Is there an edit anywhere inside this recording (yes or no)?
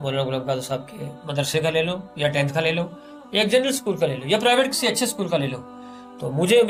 no